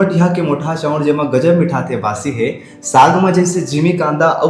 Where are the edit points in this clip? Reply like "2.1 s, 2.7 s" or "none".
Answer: none